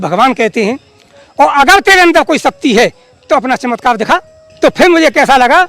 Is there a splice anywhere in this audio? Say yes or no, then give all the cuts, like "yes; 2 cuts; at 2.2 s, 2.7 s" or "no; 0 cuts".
yes; 1 cut; at 4.4 s